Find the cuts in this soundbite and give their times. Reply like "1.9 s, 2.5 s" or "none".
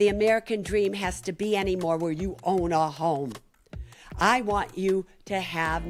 none